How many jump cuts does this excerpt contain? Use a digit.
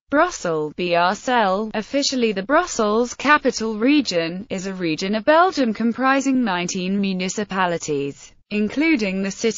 0